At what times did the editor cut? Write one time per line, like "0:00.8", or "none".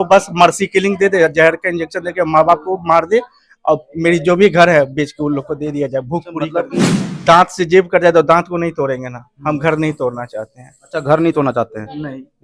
0:07.0